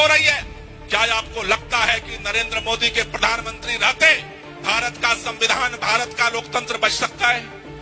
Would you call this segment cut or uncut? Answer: uncut